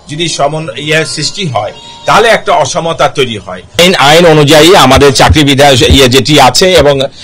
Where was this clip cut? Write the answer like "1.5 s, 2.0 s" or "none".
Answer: 3.8 s